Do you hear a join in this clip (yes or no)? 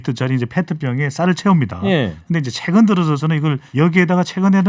yes